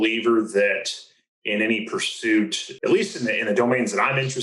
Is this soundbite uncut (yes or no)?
no